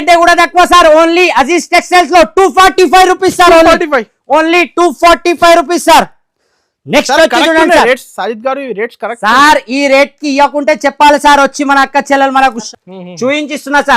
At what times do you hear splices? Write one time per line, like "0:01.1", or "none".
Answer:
0:12.6